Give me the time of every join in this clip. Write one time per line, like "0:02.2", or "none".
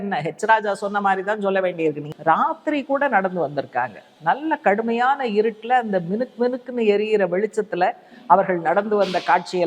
0:02.1